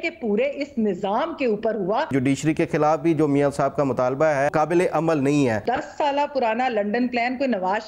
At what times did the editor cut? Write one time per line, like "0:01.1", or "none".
0:02.1
0:04.5
0:05.6